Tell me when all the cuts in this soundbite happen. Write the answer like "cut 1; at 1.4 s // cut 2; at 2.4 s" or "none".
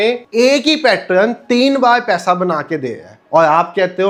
none